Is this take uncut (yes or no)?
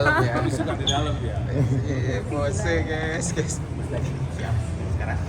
yes